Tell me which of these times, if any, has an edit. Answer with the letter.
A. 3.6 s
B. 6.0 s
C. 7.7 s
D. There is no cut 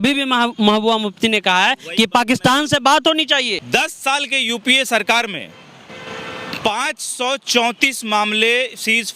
A